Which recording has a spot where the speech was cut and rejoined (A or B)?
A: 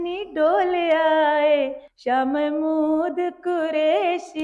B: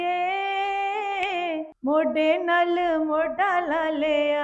B